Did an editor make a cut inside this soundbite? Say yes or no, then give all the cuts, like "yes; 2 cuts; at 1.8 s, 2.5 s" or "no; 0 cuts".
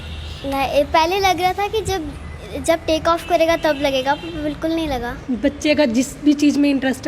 yes; 1 cut; at 5.1 s